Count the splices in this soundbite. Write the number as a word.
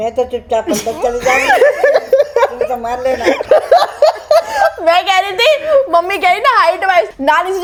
zero